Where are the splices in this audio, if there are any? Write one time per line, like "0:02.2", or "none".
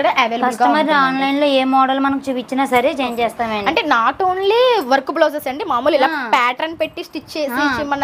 none